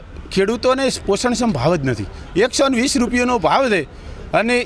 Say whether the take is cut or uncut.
uncut